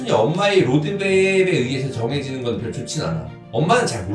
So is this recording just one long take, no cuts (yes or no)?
yes